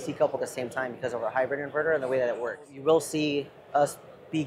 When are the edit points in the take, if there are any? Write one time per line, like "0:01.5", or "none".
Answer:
0:02.8